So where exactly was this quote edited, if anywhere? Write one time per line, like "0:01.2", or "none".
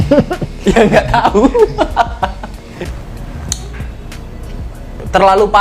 0:02.9